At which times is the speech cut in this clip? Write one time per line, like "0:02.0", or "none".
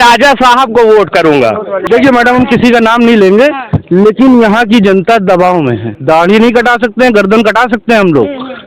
0:01.8
0:05.9